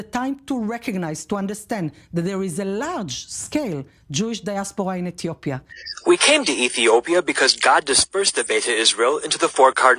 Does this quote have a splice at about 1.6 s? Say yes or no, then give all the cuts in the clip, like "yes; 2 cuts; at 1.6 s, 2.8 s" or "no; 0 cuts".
no; 1 cut; at 5.7 s